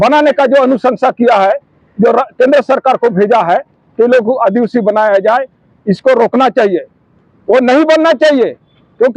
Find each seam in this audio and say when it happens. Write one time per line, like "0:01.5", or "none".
none